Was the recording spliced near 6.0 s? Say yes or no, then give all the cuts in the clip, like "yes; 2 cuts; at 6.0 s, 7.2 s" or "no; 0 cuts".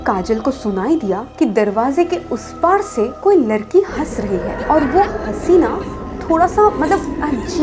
no; 0 cuts